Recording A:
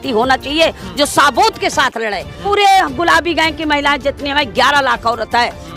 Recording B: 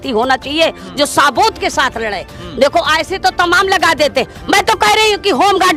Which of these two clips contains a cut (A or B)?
A